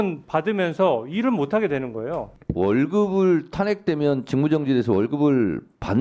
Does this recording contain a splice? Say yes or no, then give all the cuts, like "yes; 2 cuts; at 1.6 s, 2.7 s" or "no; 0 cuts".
yes; 1 cut; at 2.4 s